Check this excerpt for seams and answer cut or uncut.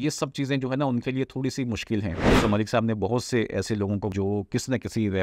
cut